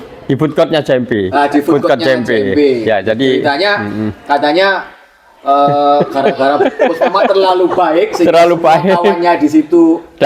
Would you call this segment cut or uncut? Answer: uncut